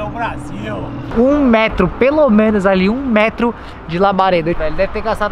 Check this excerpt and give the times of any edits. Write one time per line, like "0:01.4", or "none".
0:01.0
0:04.6

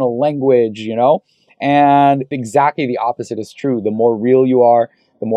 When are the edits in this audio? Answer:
0:02.3

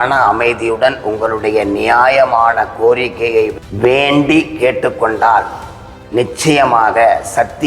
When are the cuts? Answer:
0:03.5

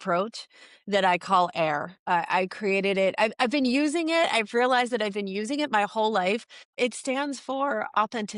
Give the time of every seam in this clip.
none

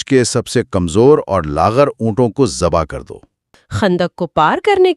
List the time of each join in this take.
0:03.5

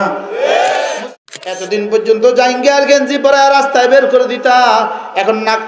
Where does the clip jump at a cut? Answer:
0:01.2

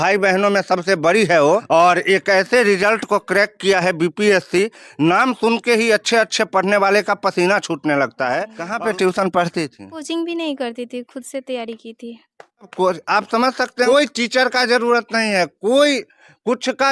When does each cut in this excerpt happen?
0:01.6
0:08.6
0:10.0
0:12.7
0:13.9

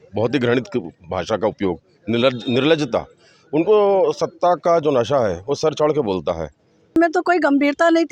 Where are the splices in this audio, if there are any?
0:06.9

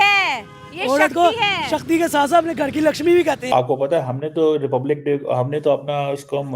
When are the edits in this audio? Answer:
0:03.5

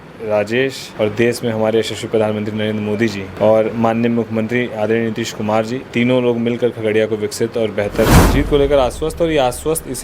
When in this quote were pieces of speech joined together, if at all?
0:00.8
0:03.3
0:05.8
0:08.2

